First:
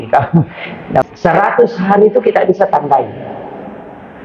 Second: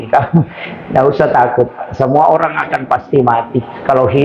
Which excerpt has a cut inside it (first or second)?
first